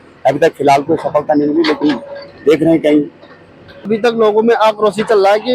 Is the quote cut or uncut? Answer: cut